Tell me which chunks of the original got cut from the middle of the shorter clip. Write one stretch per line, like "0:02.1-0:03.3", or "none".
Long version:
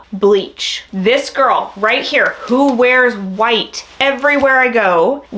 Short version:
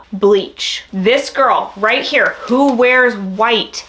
none